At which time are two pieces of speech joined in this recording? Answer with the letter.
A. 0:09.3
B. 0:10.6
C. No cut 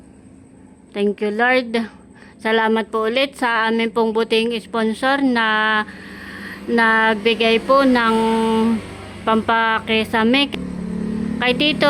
B